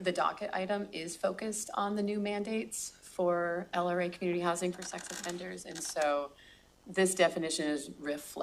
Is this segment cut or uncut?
uncut